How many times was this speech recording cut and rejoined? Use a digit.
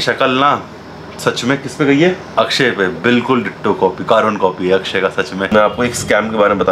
2